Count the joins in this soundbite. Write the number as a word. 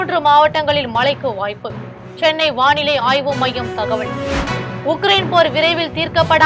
one